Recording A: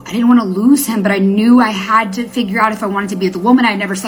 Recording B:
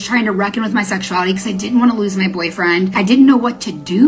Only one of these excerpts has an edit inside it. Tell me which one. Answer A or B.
B